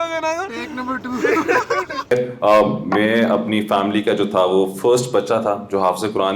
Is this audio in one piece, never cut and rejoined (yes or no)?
no